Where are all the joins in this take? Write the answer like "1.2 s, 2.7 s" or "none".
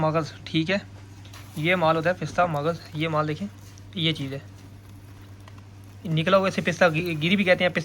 none